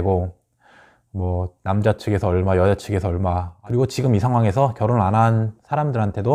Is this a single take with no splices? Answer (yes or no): no